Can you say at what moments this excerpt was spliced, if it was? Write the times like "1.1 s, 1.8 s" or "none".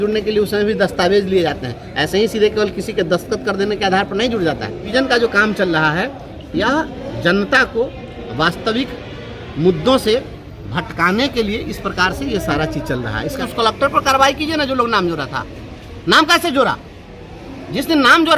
4.9 s, 13.4 s